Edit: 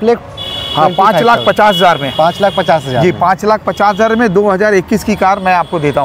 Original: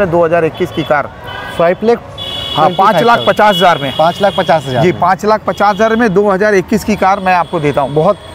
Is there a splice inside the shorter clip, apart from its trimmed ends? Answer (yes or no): no